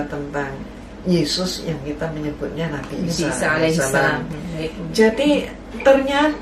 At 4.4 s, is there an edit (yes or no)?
yes